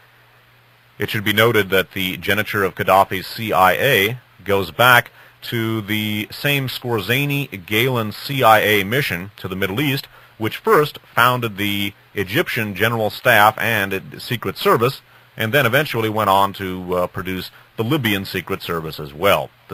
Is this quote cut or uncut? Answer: uncut